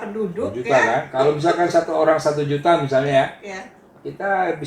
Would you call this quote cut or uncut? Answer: uncut